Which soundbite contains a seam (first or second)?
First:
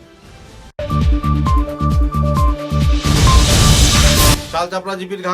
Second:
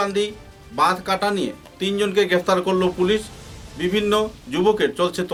first